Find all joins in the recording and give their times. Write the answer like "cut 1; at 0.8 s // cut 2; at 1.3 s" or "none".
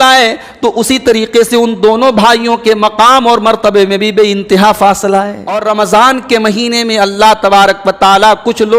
cut 1; at 5.6 s